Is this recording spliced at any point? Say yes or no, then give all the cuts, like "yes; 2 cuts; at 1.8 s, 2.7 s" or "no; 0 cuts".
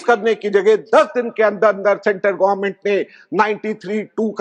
no; 0 cuts